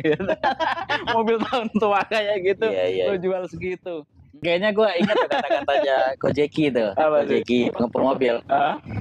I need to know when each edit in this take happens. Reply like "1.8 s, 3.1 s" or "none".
4.3 s